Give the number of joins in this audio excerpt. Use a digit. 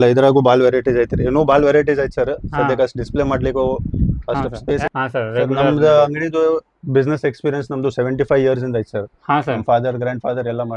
1